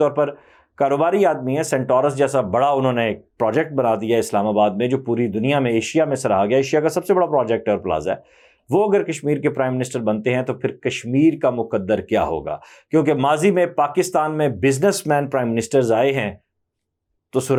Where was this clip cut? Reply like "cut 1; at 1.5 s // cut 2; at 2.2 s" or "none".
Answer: none